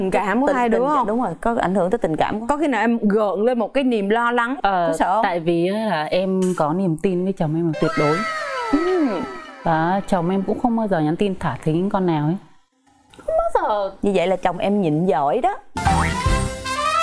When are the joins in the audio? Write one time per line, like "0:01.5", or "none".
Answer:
0:15.7

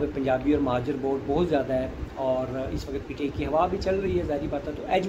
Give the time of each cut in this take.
none

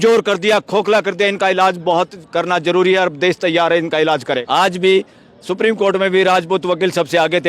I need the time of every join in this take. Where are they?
0:04.4

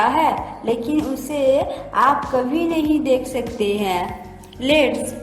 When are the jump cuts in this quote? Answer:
none

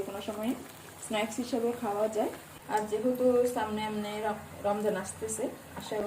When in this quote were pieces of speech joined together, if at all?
0:02.5

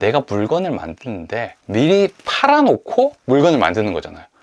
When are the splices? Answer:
0:01.6

